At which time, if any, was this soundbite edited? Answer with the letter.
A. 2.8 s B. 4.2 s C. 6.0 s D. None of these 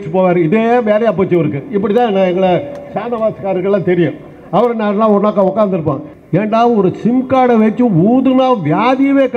C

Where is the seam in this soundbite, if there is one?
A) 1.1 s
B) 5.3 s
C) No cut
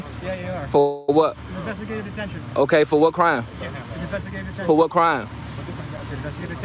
C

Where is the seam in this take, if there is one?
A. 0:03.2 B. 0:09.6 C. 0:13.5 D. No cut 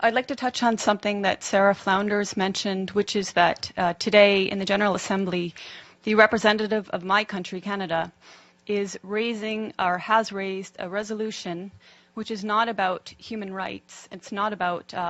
D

